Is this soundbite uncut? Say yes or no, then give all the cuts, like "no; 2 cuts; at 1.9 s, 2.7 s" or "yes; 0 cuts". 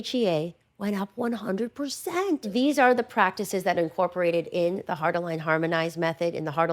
no; 1 cut; at 2.5 s